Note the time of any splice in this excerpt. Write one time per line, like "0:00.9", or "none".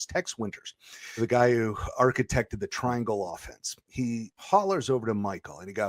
0:01.2
0:04.3